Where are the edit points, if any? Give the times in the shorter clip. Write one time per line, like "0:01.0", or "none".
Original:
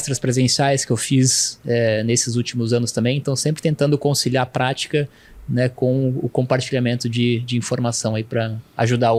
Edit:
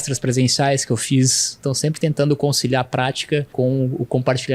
0:01.6
0:03.5